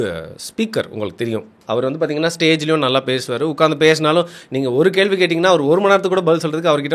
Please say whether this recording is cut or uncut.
uncut